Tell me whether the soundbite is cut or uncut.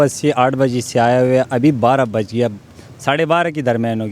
uncut